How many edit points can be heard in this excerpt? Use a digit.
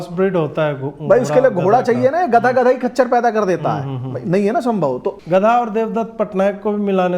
1